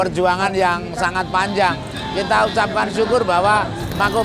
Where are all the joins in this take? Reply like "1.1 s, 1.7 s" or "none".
2.0 s